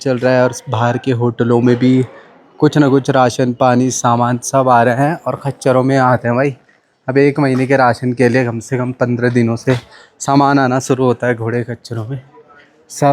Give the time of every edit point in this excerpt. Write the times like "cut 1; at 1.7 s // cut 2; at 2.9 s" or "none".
none